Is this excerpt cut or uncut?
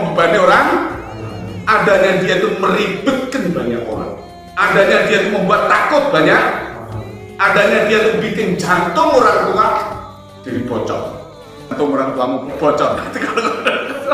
uncut